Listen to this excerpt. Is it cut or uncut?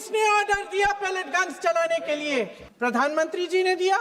cut